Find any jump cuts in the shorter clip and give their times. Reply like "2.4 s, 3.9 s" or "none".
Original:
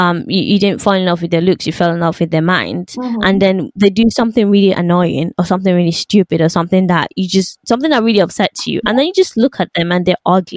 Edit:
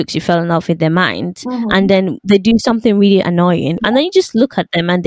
3.8 s